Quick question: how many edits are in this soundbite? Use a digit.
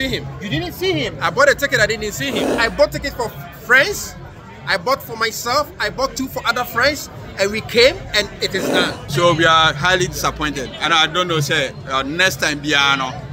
2